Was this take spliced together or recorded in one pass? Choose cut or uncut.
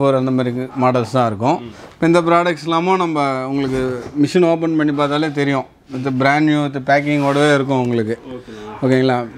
uncut